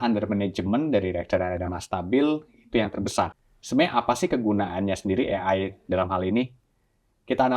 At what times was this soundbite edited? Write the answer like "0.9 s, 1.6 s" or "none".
3.4 s